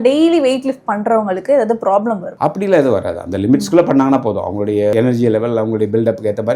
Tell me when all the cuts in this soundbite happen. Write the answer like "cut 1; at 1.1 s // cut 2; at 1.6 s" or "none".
cut 1; at 4.9 s